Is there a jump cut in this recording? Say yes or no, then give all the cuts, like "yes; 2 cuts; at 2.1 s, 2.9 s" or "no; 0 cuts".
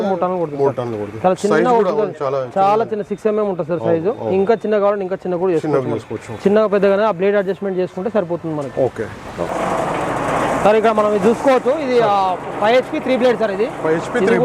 no; 0 cuts